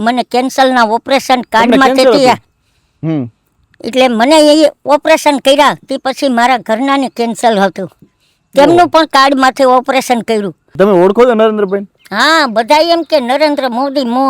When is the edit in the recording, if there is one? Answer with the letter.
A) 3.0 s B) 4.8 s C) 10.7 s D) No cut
C